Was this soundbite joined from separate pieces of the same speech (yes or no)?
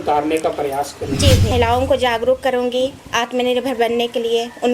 yes